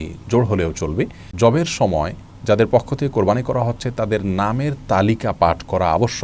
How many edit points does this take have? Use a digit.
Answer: 1